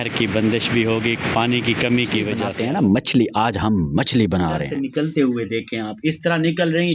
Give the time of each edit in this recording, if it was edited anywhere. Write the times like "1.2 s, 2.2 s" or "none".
2.6 s, 4.6 s